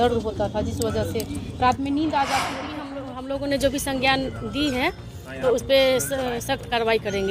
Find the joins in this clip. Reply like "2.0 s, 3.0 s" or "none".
2.9 s